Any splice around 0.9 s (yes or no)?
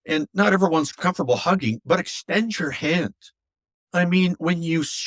yes